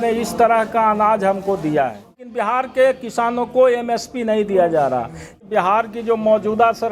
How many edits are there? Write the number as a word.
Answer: two